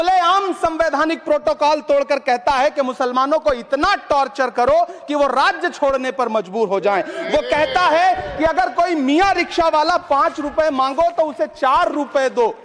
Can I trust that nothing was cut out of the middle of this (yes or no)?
yes